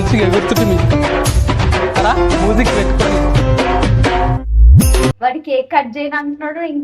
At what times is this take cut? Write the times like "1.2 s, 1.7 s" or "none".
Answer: 5.1 s